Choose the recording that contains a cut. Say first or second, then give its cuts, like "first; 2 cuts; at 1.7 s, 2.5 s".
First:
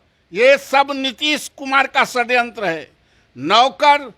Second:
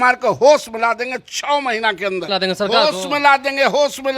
second; 1 cut; at 2.3 s